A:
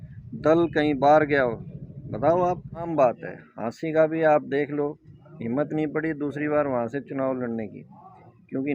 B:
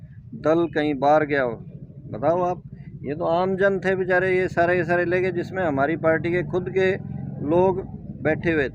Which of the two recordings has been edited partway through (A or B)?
A